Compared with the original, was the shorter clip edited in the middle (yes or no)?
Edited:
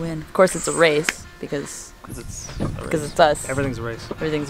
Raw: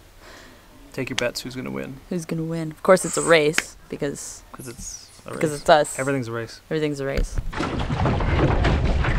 no